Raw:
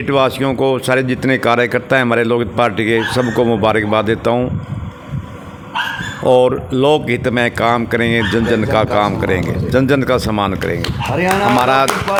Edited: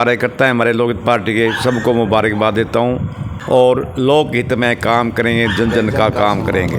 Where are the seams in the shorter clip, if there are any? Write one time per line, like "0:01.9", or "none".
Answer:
0:03.3